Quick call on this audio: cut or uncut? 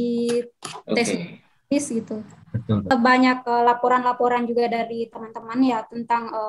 cut